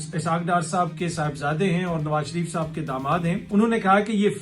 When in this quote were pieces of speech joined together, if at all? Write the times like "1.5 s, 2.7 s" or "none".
3.4 s